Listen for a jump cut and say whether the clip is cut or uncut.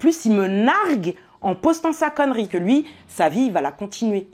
cut